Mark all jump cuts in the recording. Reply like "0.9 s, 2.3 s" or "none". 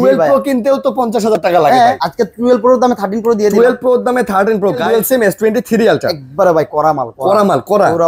2.0 s, 4.8 s